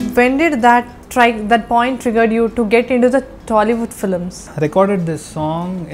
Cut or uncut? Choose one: cut